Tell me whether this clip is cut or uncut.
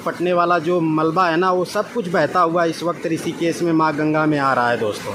uncut